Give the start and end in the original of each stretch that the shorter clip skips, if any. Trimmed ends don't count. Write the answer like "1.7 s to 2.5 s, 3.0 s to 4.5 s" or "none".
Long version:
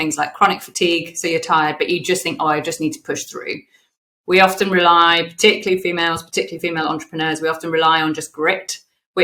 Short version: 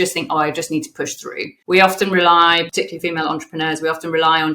3.6 s to 4.1 s, 5.3 s to 6.3 s